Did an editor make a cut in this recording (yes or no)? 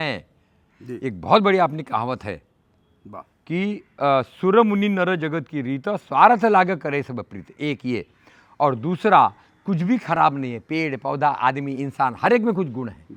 no